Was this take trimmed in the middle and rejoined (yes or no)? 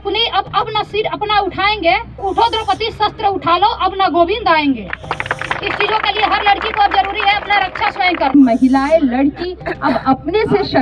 yes